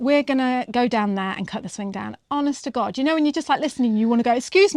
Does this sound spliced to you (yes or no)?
no